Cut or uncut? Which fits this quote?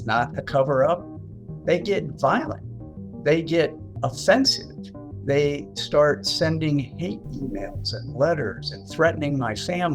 cut